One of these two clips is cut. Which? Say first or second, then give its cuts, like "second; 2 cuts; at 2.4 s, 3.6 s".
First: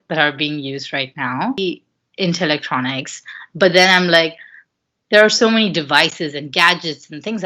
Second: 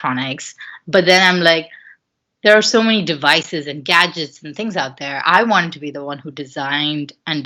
first; 1 cut; at 1.6 s